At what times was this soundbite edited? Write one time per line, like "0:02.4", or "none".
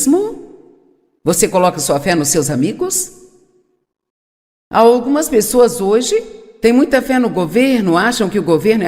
0:05.5